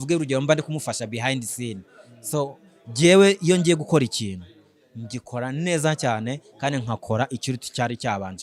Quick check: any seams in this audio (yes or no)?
no